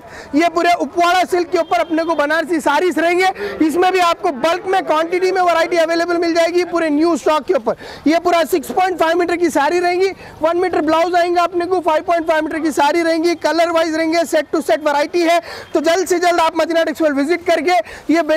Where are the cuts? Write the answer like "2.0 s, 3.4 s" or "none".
none